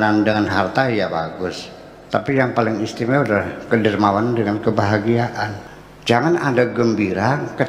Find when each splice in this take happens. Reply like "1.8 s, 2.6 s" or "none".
5.6 s